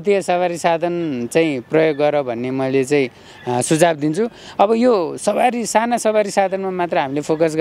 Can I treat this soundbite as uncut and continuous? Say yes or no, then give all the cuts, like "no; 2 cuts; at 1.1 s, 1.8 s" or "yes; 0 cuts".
yes; 0 cuts